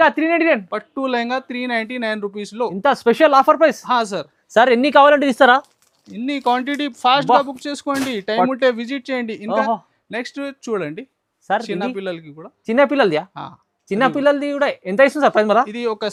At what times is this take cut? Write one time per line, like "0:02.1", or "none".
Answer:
none